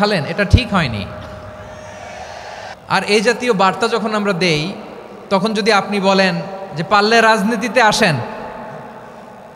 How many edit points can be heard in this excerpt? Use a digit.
1